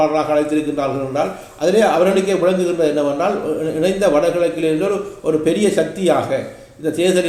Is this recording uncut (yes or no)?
yes